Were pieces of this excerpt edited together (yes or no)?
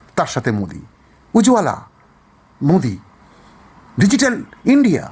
no